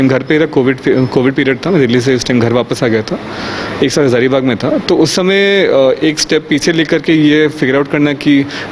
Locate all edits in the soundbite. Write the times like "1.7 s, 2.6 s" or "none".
none